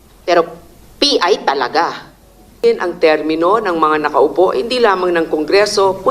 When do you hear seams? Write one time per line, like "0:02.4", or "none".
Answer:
0:02.6